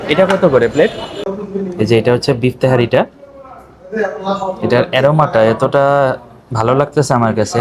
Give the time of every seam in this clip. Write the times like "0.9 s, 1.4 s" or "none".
1.3 s